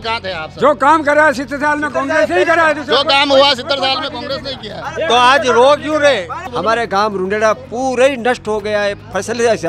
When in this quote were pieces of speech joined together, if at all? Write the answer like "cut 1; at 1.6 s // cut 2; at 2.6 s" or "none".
cut 1; at 6.4 s